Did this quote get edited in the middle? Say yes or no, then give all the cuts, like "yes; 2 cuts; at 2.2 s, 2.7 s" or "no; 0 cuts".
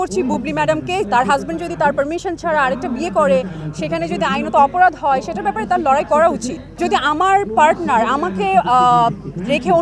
yes; 2 cuts; at 1.1 s, 6.8 s